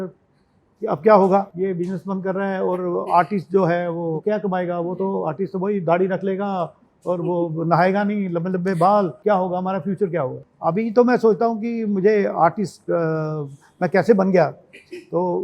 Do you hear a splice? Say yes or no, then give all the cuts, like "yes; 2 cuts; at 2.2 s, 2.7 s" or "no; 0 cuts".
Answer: yes; 4 cuts; at 1.5 s, 4.2 s, 9.1 s, 10.4 s